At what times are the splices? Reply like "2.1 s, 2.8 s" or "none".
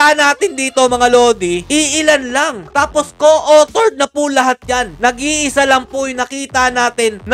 none